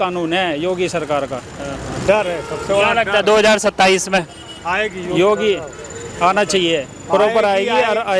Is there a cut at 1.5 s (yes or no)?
no